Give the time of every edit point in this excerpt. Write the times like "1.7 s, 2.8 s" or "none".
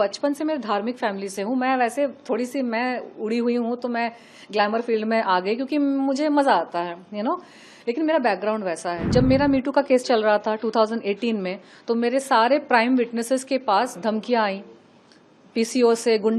9.0 s